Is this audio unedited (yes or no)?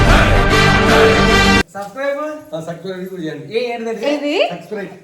no